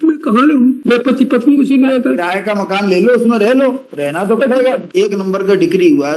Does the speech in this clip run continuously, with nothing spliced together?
no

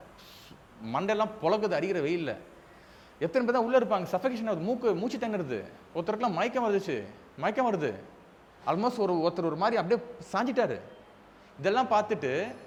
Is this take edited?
no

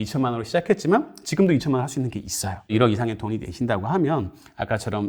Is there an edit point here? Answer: yes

